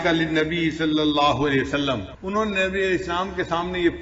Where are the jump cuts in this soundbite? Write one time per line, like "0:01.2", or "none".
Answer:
0:02.1